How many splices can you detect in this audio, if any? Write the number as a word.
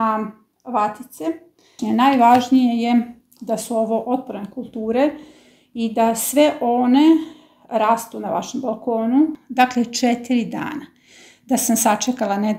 two